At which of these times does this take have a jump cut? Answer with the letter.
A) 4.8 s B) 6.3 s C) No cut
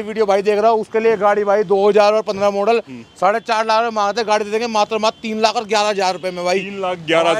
C